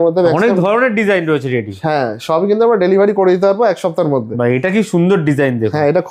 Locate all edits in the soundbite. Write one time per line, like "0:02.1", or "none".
none